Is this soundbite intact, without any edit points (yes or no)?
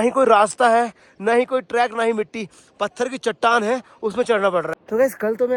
yes